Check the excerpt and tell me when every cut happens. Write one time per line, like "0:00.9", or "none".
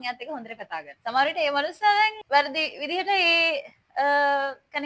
0:00.9
0:02.2